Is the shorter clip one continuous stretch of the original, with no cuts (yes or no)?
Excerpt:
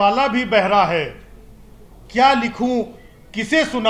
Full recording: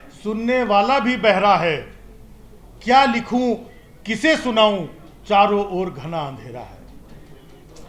yes